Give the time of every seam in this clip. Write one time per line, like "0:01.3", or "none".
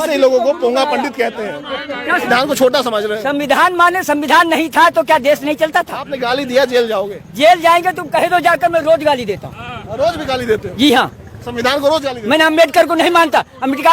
0:02.3